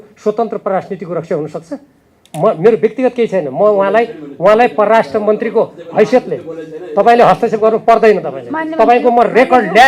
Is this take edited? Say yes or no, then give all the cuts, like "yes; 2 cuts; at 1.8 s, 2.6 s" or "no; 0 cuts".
no; 0 cuts